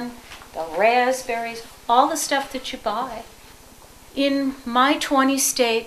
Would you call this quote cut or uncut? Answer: cut